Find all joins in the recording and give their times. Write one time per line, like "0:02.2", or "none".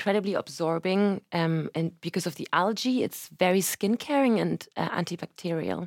none